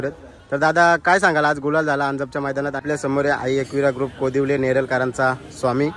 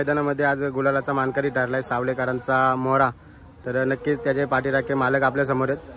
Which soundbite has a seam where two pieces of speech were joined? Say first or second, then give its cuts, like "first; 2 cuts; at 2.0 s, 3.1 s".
first; 1 cut; at 2.8 s